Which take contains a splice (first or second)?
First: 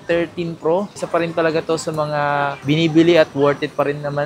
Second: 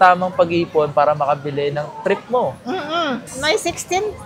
second